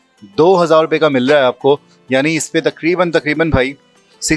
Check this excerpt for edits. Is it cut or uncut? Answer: uncut